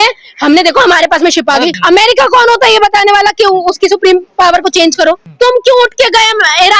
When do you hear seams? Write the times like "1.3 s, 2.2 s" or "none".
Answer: 1.8 s, 5.3 s